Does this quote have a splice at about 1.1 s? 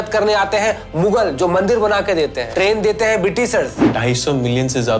no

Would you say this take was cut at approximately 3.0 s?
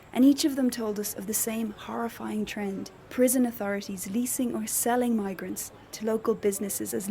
yes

